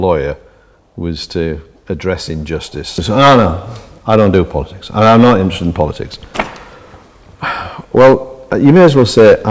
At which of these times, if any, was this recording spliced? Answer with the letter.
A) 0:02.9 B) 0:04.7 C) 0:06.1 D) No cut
A